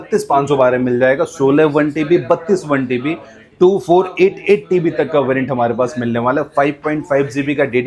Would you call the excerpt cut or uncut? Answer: uncut